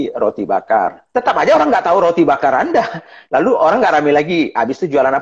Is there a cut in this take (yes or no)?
yes